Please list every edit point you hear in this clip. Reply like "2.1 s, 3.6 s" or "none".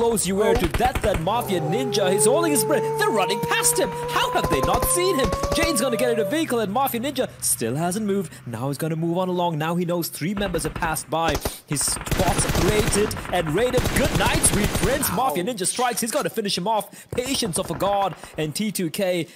none